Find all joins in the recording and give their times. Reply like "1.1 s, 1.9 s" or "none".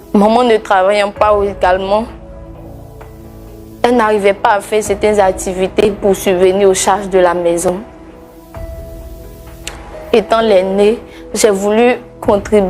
2.1 s, 3.8 s